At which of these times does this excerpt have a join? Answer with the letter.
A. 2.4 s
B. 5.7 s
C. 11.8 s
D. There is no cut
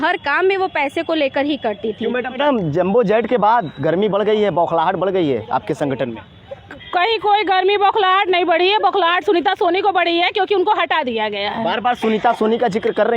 A